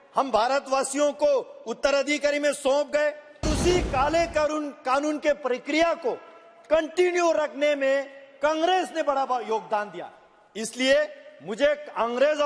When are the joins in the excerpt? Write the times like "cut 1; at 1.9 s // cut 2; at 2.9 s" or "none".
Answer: cut 1; at 3.5 s